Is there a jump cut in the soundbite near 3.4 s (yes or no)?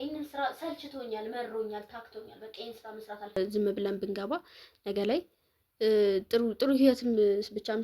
yes